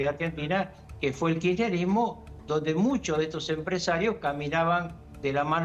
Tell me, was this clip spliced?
no; 0 cuts

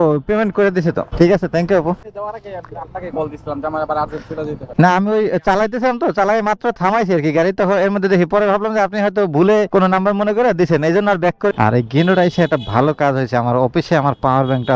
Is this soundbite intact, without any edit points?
no; 4 cuts; at 1.1 s, 2.0 s, 4.6 s, 11.5 s

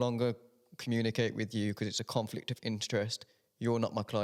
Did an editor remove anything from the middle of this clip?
no; 0 cuts

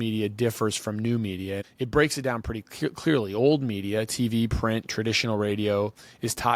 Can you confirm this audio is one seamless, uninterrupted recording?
no; 1 cut; at 1.7 s

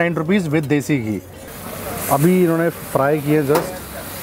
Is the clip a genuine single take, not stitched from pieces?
no; 1 cut; at 1.5 s

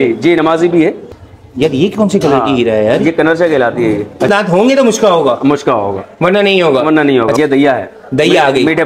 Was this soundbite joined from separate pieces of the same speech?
yes; 3 cuts; at 1.0 s, 4.3 s, 7.3 s

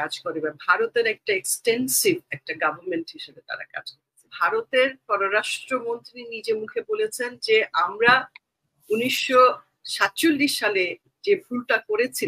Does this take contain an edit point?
yes; 1 cut; at 4.3 s

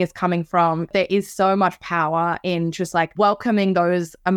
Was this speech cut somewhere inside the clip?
yes; 2 cuts; at 0.9 s, 3.1 s

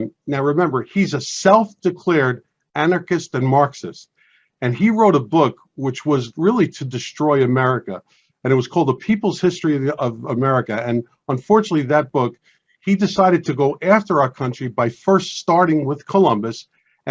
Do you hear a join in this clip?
no; 0 cuts

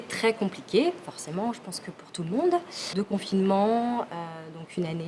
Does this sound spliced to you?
no; 0 cuts

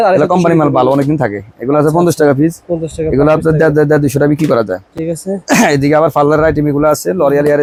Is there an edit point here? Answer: no; 0 cuts

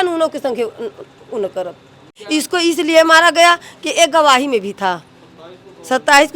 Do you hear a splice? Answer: yes; 1 cut; at 2.2 s

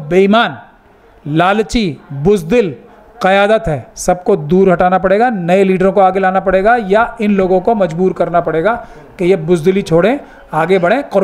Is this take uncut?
yes; 0 cuts

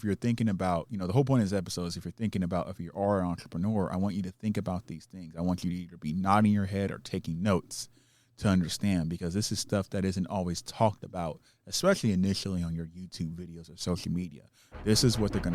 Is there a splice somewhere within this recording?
no; 0 cuts

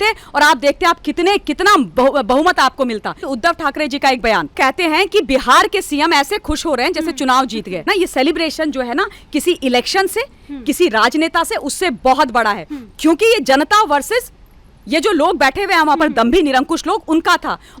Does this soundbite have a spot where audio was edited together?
yes; 3 cuts; at 3.2 s, 4.5 s, 7.8 s

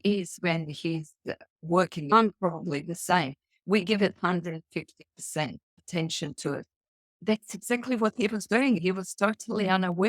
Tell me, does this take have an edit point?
yes; 4 cuts; at 2.1 s, 5.7 s, 7.2 s, 8.8 s

